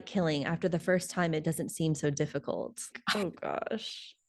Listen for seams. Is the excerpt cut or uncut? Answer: cut